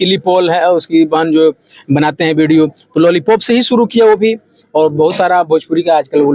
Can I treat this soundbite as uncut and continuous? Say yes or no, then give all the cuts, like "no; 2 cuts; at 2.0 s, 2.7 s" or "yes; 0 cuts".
yes; 0 cuts